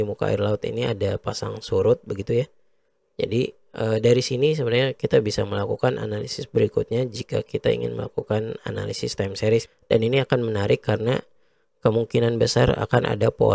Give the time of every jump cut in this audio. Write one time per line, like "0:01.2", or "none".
0:09.7